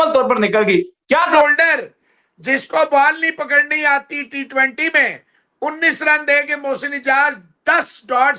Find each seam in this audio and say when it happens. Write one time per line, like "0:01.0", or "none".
0:01.3